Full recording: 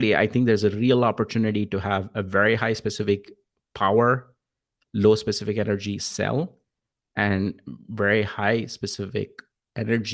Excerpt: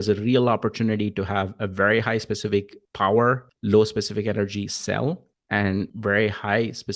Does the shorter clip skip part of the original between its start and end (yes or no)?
yes